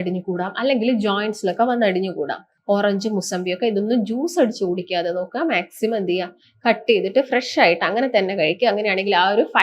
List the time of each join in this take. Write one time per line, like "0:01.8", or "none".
0:02.5